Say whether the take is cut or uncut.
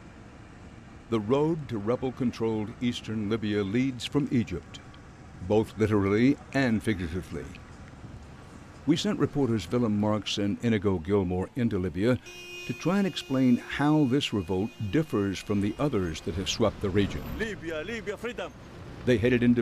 uncut